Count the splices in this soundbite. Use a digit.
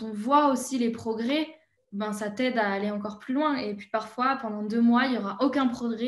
0